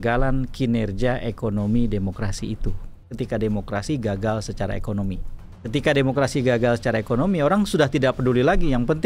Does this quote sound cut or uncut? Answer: cut